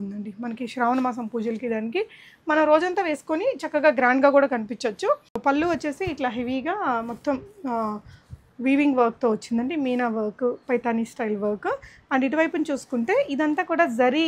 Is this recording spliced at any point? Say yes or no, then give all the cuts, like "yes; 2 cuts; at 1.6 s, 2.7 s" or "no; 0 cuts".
yes; 1 cut; at 5.3 s